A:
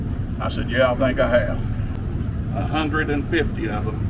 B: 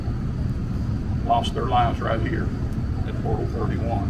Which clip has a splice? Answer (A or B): A